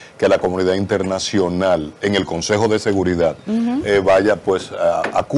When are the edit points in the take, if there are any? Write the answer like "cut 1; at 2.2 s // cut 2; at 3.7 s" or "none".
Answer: none